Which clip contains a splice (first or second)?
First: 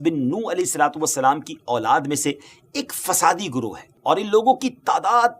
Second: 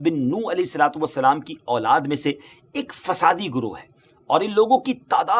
first